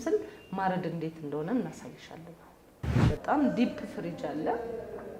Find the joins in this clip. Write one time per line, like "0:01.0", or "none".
0:03.0